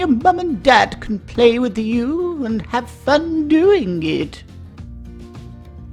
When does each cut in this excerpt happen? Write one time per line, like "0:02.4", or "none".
none